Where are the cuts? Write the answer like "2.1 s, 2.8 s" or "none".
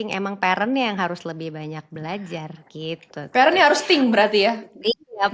none